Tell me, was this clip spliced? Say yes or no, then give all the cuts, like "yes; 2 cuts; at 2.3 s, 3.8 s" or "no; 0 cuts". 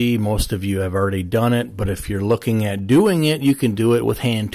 no; 0 cuts